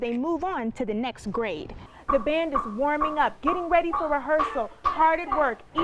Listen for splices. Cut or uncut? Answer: cut